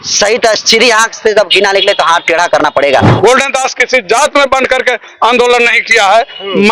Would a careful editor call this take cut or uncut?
cut